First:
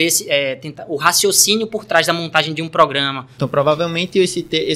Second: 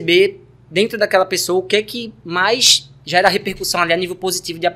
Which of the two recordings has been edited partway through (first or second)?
first